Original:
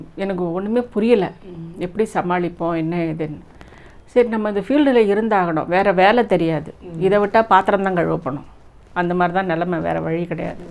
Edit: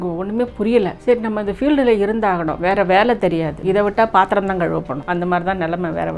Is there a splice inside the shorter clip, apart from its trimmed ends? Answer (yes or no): yes